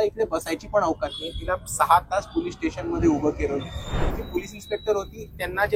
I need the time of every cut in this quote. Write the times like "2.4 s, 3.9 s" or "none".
4.1 s

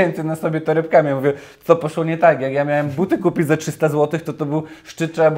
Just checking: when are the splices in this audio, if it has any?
none

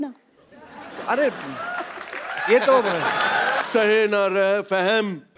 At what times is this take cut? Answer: 3.6 s

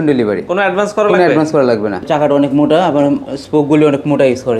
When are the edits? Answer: 2.0 s

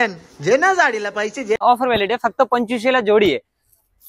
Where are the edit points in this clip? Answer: 1.6 s

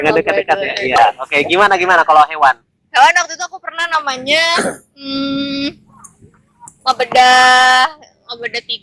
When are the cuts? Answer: none

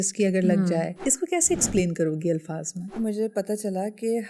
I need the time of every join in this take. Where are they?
0.9 s, 3.0 s

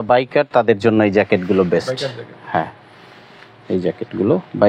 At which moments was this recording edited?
none

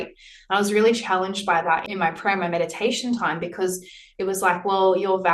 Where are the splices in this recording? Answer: 1.9 s

